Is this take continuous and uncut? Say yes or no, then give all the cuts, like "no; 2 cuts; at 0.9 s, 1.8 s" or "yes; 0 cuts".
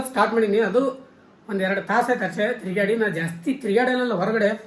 yes; 0 cuts